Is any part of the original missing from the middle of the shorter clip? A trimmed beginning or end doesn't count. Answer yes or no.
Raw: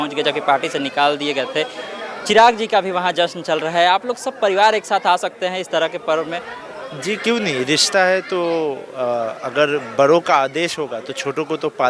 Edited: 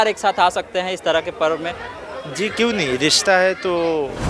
no